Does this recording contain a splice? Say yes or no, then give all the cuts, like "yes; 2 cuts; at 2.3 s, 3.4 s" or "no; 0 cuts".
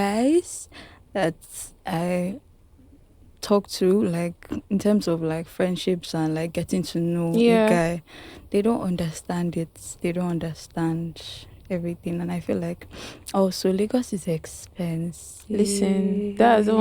no; 0 cuts